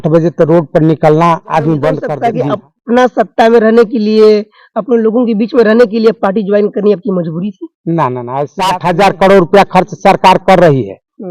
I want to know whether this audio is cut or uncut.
cut